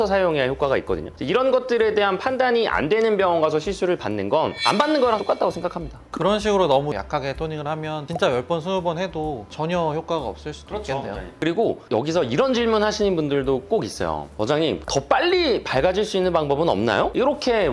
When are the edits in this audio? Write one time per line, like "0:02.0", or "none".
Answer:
0:14.8